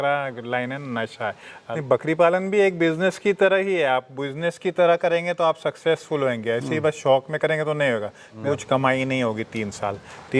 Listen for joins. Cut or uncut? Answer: cut